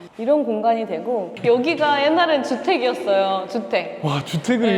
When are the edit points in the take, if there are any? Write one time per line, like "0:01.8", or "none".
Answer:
0:01.3